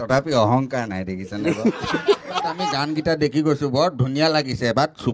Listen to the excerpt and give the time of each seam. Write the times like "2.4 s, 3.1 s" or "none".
2.7 s